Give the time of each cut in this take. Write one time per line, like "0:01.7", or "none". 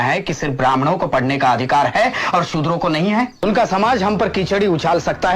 0:03.4

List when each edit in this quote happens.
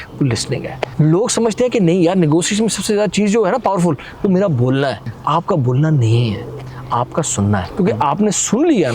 0:00.8
0:05.1
0:07.7

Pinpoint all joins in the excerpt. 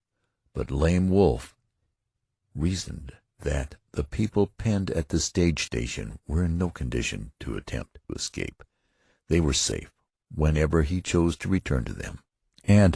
0:09.9

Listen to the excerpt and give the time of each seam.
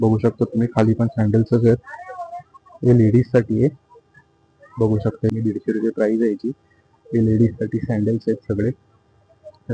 0:05.3

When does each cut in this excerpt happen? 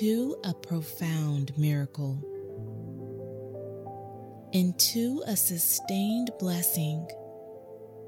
0:02.2
0:04.4
0:07.1

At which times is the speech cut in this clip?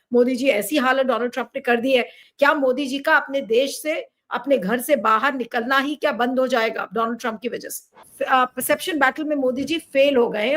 0:02.2

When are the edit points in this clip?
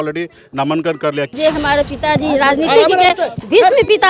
0:01.3

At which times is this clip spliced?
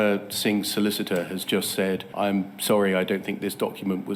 0:02.1

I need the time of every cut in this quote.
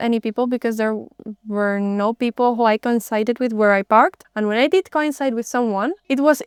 none

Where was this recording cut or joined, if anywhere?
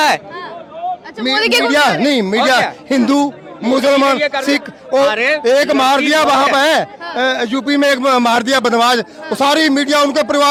none

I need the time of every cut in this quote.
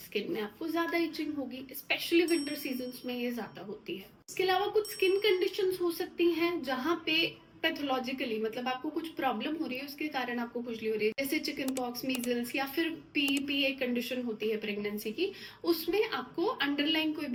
none

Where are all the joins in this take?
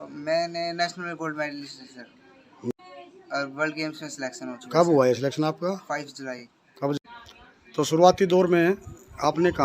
0:06.9

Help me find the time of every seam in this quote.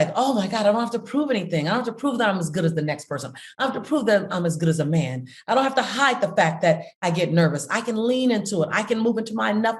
none

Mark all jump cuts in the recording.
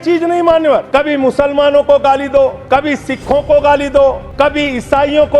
0:00.9
0:02.6
0:04.2

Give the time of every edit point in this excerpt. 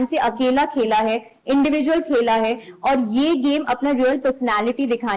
none

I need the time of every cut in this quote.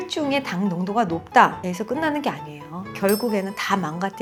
none

